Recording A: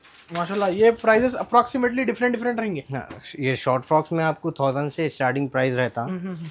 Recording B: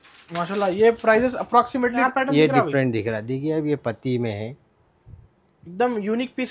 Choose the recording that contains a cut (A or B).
B